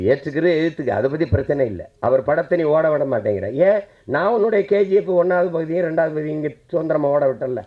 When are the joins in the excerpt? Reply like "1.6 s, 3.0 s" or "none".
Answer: none